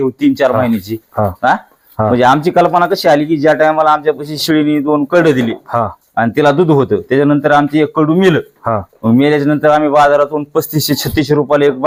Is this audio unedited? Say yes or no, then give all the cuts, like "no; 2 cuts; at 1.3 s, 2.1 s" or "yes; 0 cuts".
yes; 0 cuts